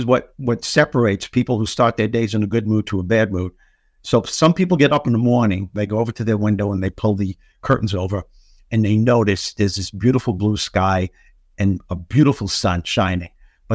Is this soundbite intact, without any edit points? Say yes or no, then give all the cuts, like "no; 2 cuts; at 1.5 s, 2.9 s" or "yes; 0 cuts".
no; 1 cut; at 5.8 s